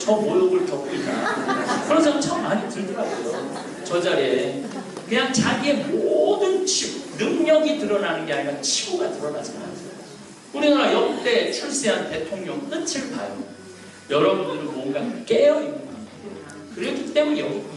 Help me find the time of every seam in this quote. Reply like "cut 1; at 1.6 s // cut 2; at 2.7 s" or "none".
cut 1; at 14.0 s